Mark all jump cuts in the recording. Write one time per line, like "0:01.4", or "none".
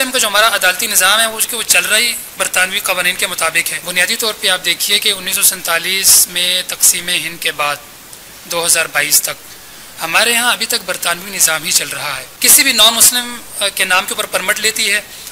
0:03.7
0:12.3